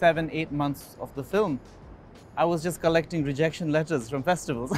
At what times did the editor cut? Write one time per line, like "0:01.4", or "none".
none